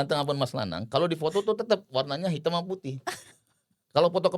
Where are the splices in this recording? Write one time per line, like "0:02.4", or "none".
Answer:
none